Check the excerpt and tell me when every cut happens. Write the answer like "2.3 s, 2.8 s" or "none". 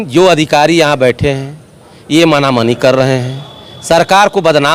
none